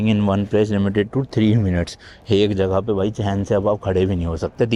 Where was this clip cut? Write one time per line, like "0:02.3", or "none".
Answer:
none

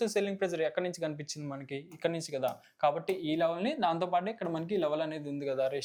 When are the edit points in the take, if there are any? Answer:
none

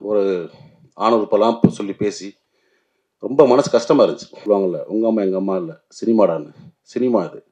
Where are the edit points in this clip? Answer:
0:04.4

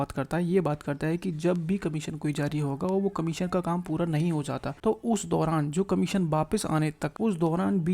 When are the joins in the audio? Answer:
0:04.7
0:07.1

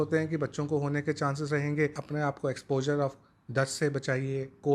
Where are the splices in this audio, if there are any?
0:02.0

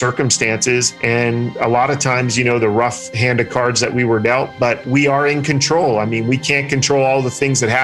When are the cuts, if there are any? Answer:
0:01.4

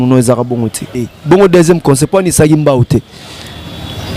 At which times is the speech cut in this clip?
0:00.9

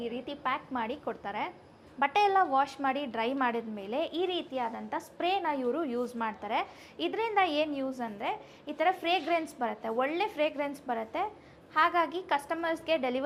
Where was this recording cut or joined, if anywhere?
none

